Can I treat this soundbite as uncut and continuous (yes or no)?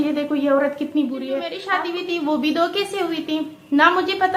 no